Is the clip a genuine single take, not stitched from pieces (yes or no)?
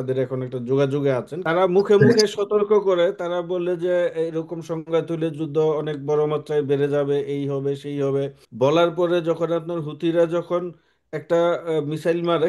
no